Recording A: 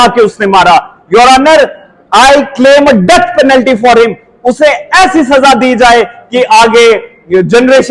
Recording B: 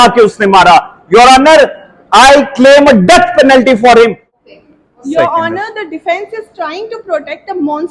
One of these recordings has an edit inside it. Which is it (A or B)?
B